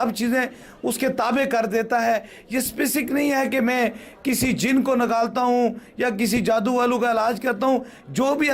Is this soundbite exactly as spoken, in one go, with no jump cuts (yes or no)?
yes